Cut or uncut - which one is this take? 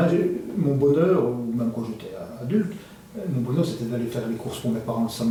uncut